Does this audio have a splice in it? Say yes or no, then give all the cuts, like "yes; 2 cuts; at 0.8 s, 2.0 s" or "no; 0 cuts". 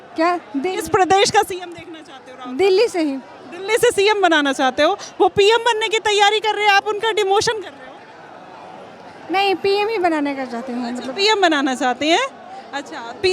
no; 0 cuts